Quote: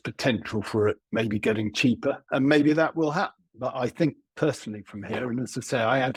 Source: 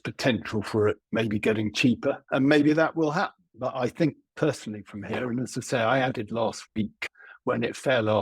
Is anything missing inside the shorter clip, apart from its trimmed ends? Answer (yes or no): no